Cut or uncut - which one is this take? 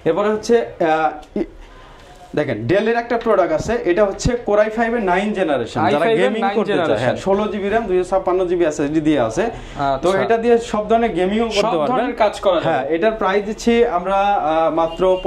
uncut